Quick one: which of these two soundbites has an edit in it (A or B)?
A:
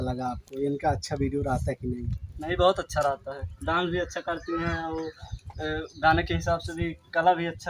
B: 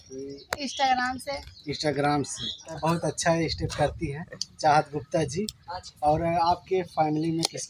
B